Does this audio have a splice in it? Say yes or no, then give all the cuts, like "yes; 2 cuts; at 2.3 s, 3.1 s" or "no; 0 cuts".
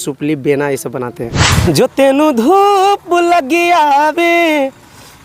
yes; 1 cut; at 1.4 s